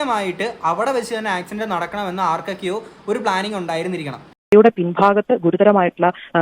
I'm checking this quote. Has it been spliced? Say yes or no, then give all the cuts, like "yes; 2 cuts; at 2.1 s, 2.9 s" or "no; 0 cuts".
yes; 1 cut; at 4.5 s